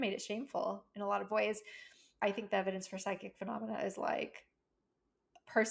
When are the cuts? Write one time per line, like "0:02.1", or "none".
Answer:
0:02.2